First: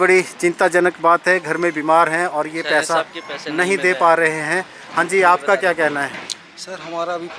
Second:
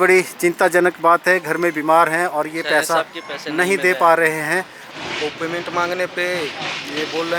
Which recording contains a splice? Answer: second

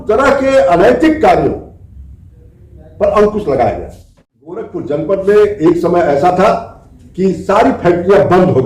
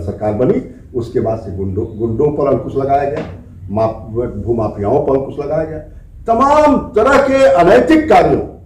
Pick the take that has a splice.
first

